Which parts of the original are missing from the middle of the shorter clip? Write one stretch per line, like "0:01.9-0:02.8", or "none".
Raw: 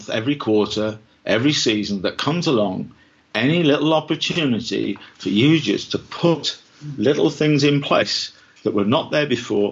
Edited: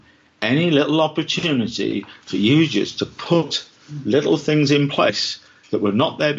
none